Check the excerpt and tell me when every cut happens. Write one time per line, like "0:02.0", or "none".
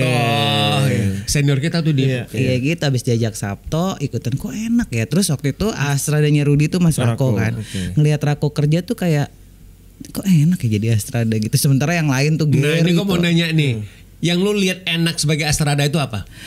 0:02.3
0:05.8